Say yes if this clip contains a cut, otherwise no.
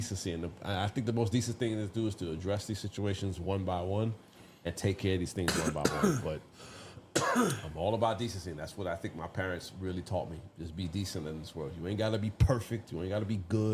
no